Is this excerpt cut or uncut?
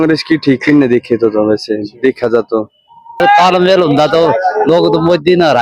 cut